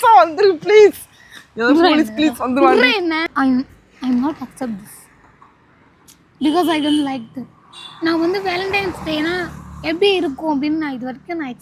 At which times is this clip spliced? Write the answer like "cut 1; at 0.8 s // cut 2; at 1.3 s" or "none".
cut 1; at 3.2 s